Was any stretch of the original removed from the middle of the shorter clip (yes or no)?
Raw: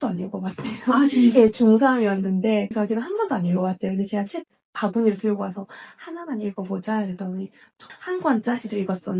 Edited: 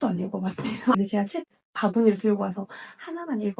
yes